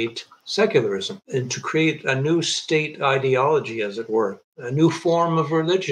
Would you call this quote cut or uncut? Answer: uncut